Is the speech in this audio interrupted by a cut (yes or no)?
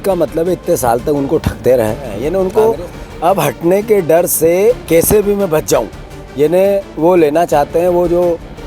yes